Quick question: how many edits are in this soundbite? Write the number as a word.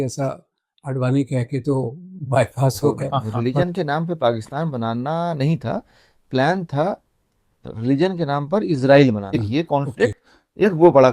two